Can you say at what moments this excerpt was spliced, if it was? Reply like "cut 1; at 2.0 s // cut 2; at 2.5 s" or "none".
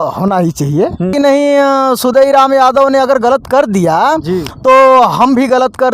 cut 1; at 1.1 s